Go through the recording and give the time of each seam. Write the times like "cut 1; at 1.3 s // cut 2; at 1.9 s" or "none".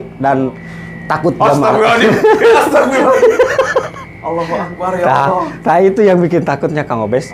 none